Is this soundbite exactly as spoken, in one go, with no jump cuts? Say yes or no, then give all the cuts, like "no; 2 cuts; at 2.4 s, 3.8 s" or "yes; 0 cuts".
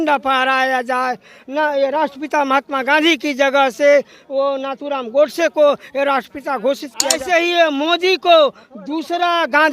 no; 1 cut; at 7.2 s